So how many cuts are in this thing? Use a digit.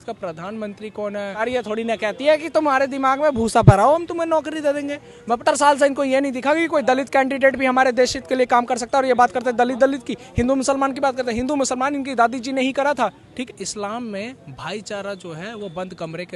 3